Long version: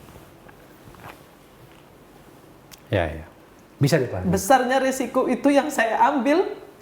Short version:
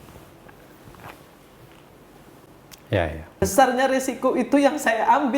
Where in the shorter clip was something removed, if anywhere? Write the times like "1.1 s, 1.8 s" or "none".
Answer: 3.4 s